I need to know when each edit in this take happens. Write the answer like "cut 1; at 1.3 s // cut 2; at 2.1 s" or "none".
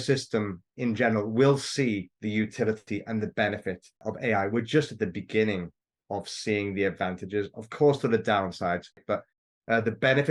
cut 1; at 9.0 s